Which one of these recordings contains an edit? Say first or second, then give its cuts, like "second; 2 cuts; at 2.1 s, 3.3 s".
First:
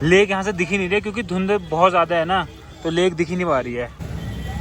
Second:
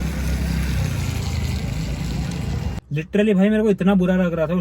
second; 1 cut; at 2.8 s